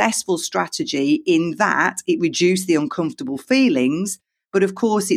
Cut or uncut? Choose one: uncut